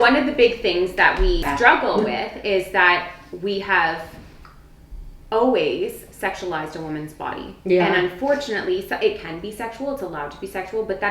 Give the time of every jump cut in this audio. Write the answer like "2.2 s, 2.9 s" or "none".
1.4 s